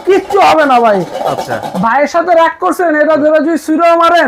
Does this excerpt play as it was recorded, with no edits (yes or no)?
yes